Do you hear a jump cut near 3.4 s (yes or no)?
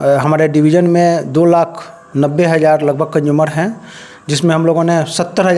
no